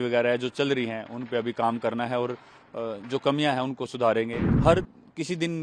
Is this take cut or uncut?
cut